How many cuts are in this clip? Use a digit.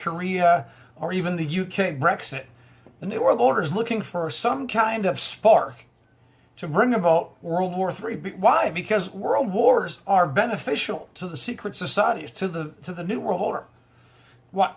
0